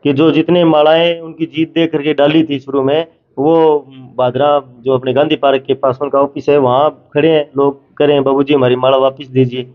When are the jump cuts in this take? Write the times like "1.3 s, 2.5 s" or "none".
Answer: none